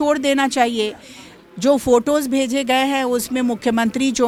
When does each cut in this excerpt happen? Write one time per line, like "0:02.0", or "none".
none